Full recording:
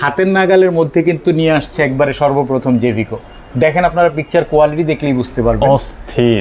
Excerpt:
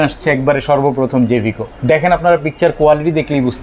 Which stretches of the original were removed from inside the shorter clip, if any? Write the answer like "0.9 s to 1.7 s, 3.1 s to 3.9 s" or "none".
3.2 s to 3.4 s